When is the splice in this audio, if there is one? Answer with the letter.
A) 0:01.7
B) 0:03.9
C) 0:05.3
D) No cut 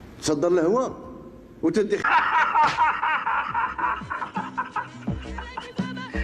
D